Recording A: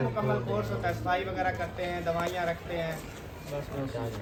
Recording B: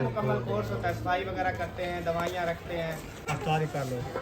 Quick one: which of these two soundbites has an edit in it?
B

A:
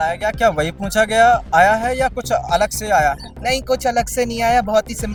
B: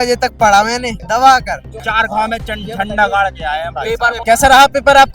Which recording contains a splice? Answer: B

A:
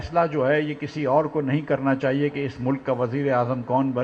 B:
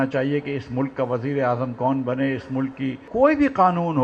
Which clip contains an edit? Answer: B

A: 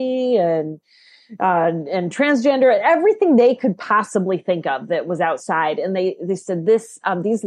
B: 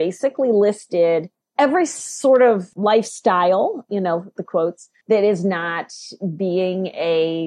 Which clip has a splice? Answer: B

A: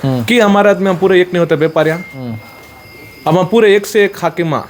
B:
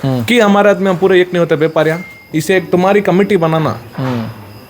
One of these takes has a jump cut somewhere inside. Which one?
B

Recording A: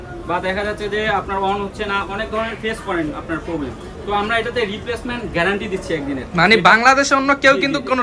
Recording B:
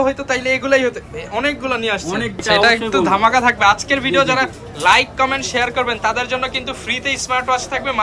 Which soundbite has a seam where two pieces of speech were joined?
B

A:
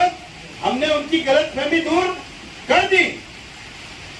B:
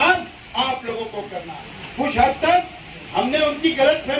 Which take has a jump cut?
B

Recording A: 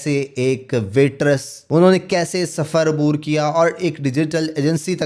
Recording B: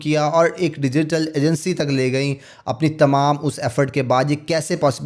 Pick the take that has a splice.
A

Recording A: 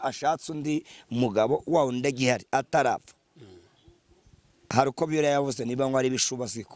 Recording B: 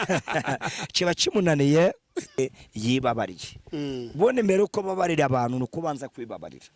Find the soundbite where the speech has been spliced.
B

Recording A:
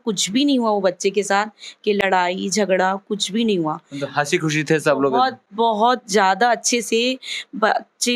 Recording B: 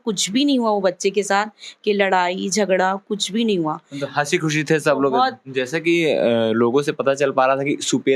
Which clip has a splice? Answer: B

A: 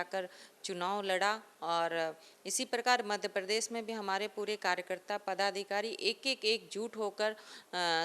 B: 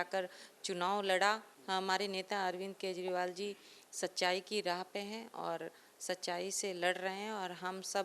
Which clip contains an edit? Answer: B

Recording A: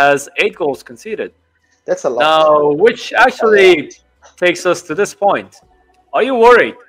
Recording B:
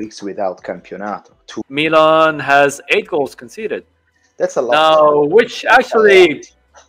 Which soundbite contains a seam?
B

